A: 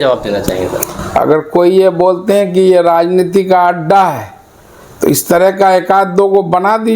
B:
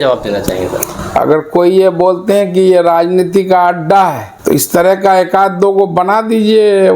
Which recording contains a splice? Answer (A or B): B